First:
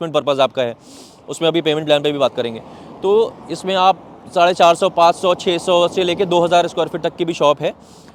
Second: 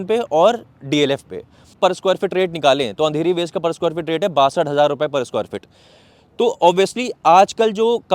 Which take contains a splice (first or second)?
second